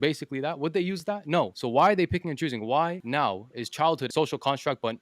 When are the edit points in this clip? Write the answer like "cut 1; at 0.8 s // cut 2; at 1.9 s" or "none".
cut 1; at 1.6 s // cut 2; at 3.0 s // cut 3; at 4.1 s